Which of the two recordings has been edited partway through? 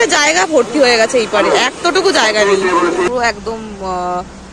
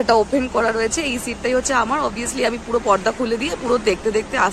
first; 1 cut; at 3.1 s

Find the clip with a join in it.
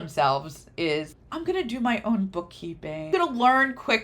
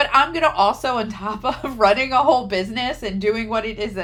first; 1 cut; at 3.1 s

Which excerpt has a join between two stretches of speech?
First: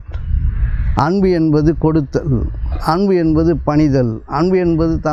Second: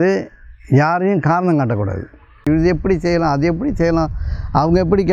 second; 1 cut; at 2.5 s

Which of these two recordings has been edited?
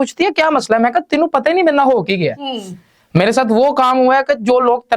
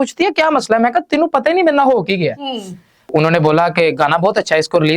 second; 1 cut; at 3.1 s

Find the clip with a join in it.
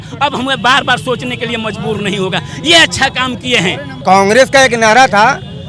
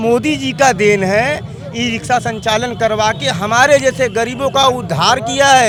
first; 1 cut; at 3.9 s

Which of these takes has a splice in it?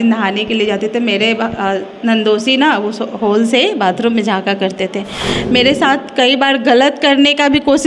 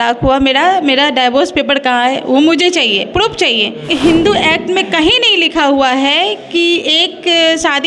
second; 1 cut; at 3.8 s

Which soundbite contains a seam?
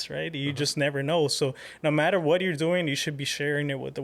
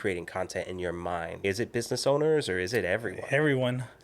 second; 1 cut; at 1.4 s

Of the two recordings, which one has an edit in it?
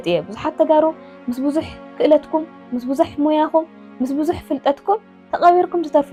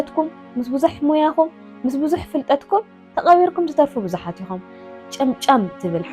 second; 1 cut; at 4.9 s

